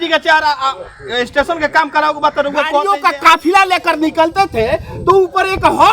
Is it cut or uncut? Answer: cut